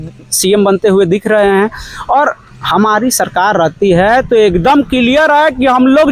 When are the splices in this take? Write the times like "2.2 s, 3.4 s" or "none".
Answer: none